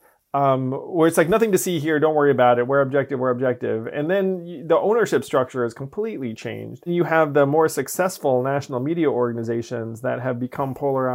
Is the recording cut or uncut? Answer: cut